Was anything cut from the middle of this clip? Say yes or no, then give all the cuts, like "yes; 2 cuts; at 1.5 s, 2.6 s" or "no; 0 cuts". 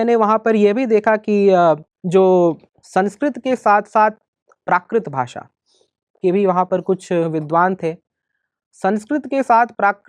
yes; 2 cuts; at 1.9 s, 2.7 s